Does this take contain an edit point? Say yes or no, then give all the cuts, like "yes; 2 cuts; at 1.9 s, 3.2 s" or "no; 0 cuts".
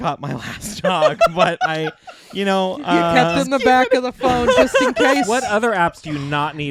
no; 0 cuts